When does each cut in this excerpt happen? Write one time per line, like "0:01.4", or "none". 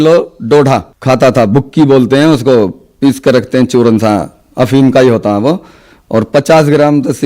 0:00.9